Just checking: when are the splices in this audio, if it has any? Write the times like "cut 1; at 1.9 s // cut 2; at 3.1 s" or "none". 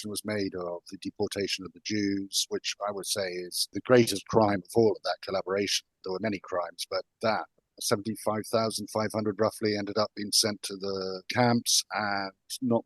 cut 1; at 3.7 s // cut 2; at 6.0 s // cut 3; at 11.2 s